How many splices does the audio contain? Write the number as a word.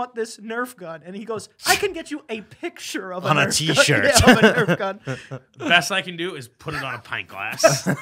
zero